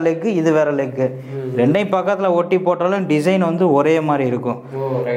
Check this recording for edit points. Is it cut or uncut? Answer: uncut